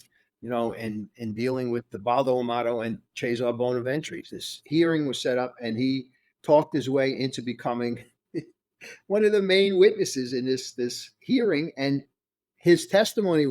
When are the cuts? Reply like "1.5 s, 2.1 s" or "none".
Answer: 4.2 s